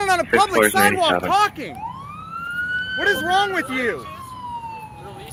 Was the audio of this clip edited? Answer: no; 0 cuts

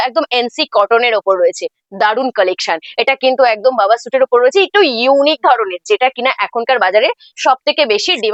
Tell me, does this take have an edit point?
no; 0 cuts

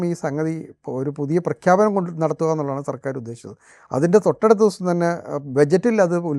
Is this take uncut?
yes; 0 cuts

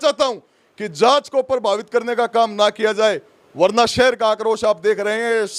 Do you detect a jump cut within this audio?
no; 0 cuts

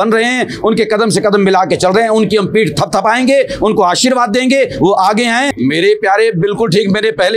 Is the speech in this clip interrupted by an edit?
yes; 1 cut; at 5.5 s

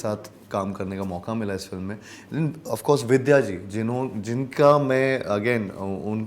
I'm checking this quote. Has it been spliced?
no; 0 cuts

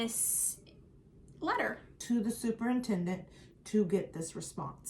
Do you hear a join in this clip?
yes; 1 cut; at 1.9 s

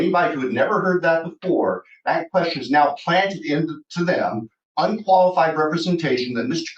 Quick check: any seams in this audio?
no; 0 cuts

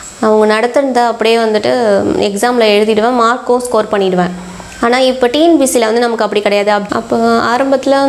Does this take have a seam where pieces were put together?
yes; 1 cut; at 6.8 s

